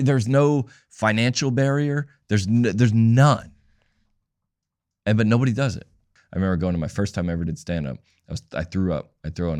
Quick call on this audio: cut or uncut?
cut